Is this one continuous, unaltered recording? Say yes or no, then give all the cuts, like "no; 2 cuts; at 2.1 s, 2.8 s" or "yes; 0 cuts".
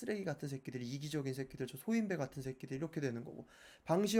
yes; 0 cuts